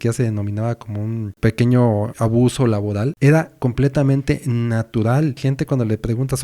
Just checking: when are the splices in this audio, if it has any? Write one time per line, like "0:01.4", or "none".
0:01.3
0:02.1
0:03.1
0:05.4

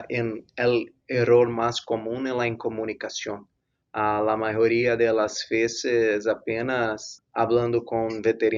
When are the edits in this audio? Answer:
0:07.2

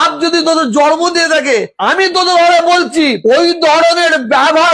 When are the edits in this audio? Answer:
none

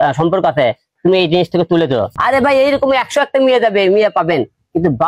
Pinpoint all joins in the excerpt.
0:02.1

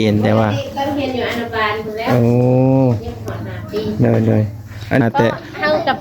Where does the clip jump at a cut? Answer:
0:05.0

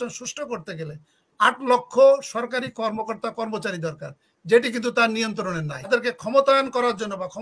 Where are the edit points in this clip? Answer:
0:05.8

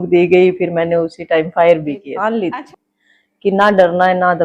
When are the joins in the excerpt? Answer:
0:02.1

